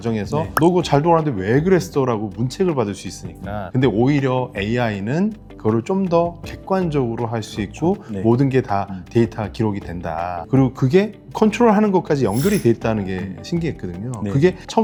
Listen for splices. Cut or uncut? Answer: uncut